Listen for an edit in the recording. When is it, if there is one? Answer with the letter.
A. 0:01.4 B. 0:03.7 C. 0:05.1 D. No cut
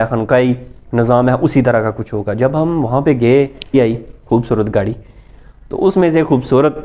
B